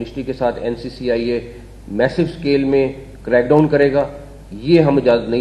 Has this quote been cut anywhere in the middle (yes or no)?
no